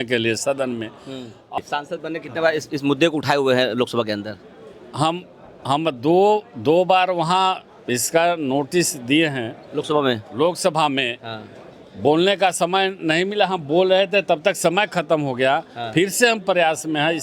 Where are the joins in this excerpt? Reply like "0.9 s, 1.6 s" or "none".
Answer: 1.6 s